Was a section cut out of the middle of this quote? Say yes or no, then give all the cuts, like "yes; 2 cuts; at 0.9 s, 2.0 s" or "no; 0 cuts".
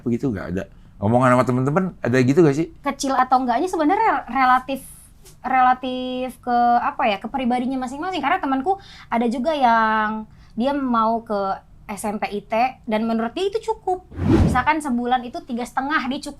yes; 2 cuts; at 3.2 s, 14.4 s